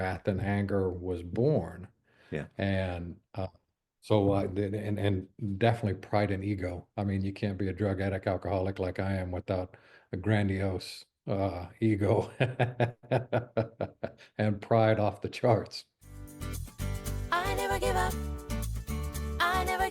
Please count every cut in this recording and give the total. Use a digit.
1